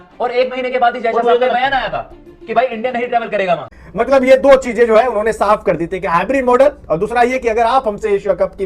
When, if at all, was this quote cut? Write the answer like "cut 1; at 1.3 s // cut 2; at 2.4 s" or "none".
cut 1; at 3.7 s